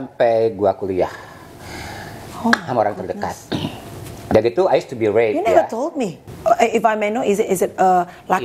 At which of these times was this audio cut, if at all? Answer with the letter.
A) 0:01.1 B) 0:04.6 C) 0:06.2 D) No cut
C